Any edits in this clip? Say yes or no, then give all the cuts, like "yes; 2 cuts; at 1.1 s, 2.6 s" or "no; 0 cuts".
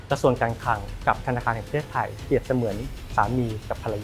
yes; 1 cut; at 0.9 s